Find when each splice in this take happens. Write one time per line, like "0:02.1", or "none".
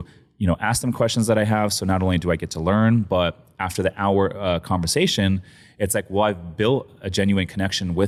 none

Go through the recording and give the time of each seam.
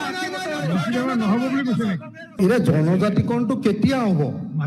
0:02.2

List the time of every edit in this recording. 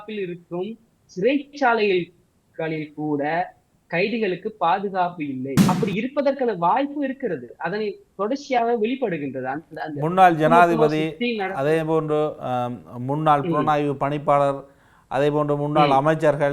0:05.6

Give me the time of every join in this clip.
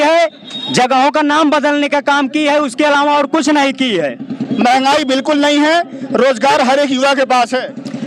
none

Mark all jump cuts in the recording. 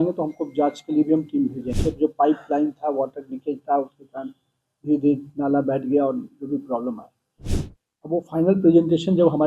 0:01.7
0:07.5

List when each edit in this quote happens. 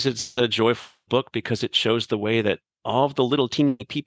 none

